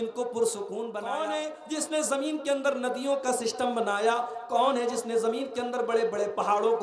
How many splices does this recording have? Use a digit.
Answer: 1